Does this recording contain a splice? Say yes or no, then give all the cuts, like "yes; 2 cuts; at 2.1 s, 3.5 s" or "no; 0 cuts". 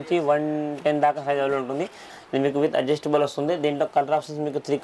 yes; 1 cut; at 2.0 s